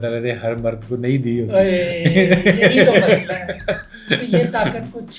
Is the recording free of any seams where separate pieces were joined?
yes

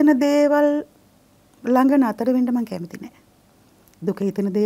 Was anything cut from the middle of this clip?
no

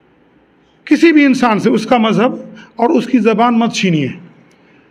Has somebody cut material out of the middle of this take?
no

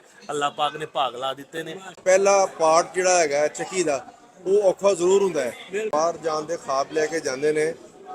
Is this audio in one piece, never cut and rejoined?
no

